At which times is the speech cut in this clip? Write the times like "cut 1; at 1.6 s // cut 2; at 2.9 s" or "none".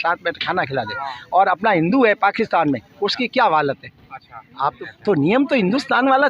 cut 1; at 4.8 s